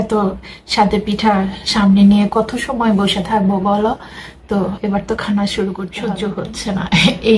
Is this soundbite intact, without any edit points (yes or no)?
no